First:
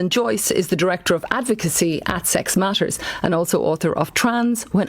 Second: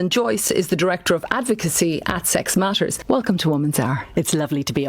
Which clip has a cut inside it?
second; 1 cut; at 3.0 s

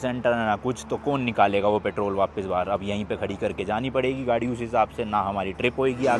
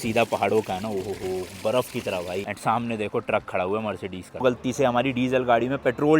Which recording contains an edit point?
second; 2 cuts; at 2.5 s, 4.4 s

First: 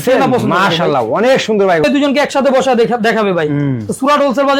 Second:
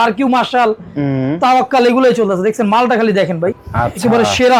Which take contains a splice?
first; 1 cut; at 1.8 s

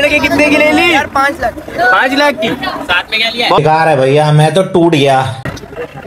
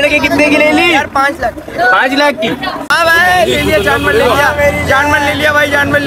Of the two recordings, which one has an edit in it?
second; 1 cut; at 2.9 s

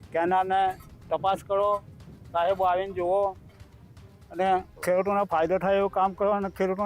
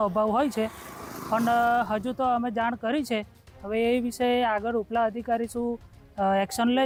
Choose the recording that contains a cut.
first; 1 cut; at 4.7 s

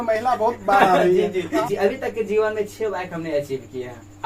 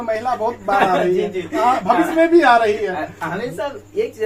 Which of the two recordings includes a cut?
first; 1 cut; at 1.6 s

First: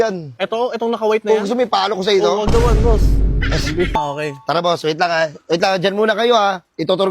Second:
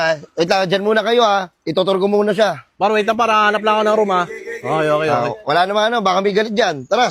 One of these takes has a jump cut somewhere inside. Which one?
first; 1 cut; at 3.9 s

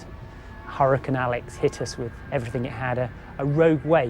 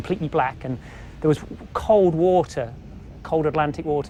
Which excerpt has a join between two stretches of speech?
first; 1 cut; at 2.2 s

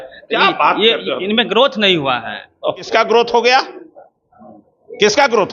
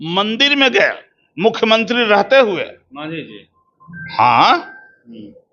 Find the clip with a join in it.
first; 1 cut; at 2.9 s

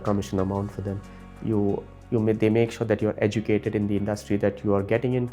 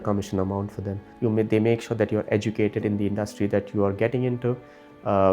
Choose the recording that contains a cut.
second; 1 cut; at 1.0 s

